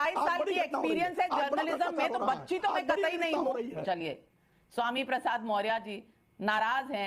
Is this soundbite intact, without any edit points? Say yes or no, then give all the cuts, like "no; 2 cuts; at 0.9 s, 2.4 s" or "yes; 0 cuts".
no; 1 cut; at 3.8 s